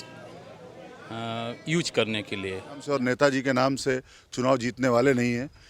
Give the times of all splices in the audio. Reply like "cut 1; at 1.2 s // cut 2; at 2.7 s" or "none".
cut 1; at 2.8 s